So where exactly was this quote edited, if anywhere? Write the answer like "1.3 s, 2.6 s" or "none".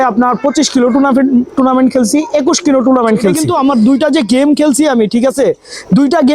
3.4 s